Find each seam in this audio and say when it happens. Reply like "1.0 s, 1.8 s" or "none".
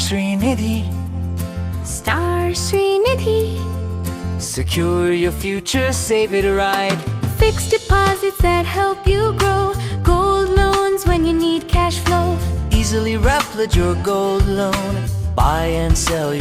none

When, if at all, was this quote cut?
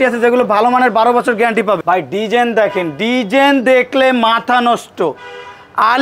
1.8 s

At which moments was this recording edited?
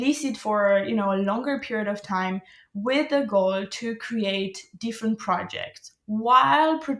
none

